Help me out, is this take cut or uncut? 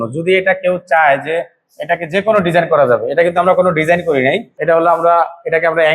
cut